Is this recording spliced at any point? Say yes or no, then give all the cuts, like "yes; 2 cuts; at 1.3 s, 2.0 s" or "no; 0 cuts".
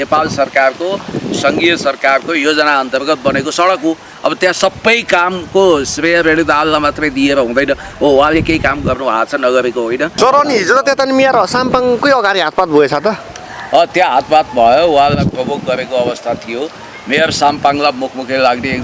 yes; 1 cut; at 10.1 s